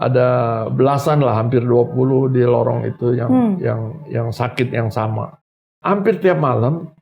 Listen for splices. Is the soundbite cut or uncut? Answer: cut